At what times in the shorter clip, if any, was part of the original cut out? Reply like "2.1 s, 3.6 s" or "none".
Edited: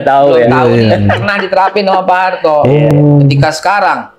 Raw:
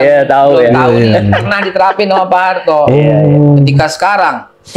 2.9 s